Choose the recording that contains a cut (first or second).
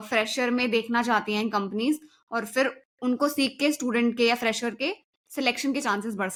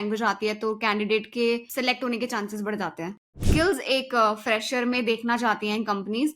second